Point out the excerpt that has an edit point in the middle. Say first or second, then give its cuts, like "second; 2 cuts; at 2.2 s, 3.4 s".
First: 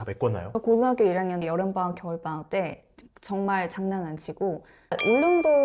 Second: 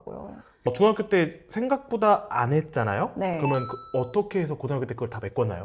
first; 1 cut; at 4.7 s